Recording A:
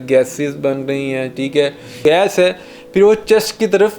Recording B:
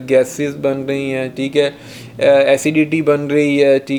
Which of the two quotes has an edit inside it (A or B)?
A